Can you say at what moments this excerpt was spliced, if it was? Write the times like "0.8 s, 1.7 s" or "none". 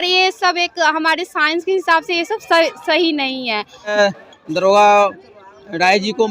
3.9 s

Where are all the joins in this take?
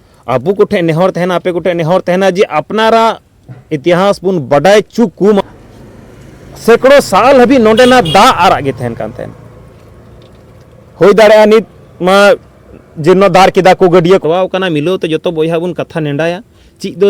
5.4 s, 14.2 s

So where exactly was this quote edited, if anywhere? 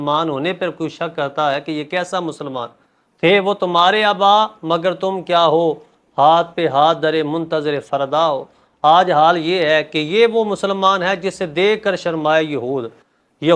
none

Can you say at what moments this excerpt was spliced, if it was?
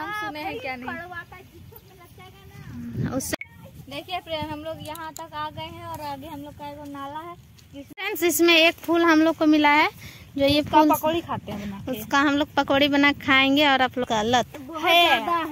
3.3 s, 7.9 s, 14.1 s

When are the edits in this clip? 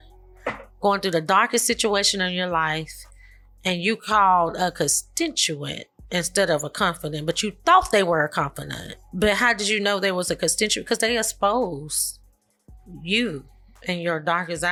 none

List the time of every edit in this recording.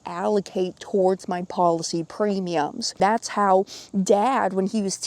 3.0 s

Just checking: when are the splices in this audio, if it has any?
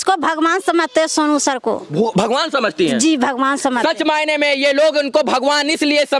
none

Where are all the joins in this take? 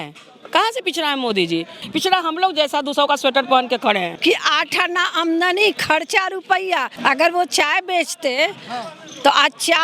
1.8 s, 4.1 s, 6.9 s

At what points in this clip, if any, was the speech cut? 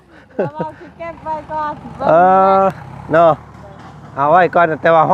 none

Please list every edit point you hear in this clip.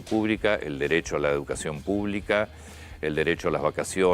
none

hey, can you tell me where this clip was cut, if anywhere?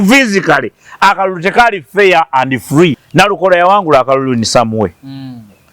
3.0 s

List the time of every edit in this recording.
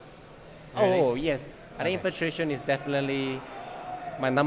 1.5 s

